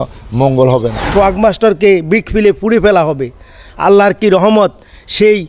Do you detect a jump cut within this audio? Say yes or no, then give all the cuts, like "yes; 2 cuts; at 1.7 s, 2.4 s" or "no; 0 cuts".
yes; 1 cut; at 1.1 s